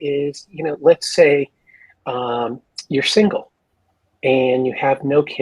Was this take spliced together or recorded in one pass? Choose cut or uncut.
uncut